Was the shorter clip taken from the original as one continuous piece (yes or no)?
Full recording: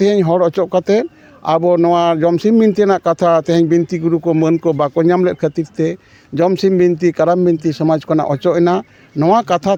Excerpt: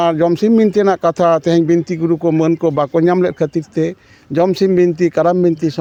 yes